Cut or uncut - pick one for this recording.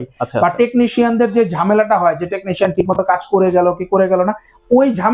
uncut